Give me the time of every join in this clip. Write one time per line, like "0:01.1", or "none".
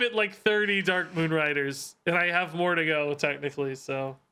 none